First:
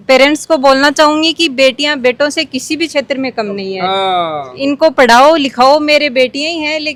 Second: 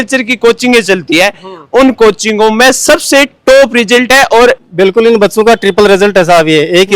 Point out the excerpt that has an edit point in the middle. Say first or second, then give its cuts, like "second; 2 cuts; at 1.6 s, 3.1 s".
second; 1 cut; at 4.6 s